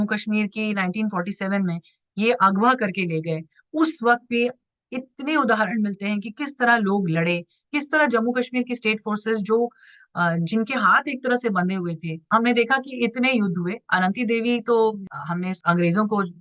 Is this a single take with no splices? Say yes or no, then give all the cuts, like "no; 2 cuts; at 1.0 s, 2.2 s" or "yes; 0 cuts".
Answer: no; 2 cuts; at 12.2 s, 15.1 s